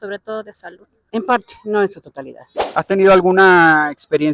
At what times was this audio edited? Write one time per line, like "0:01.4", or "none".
0:01.0
0:02.6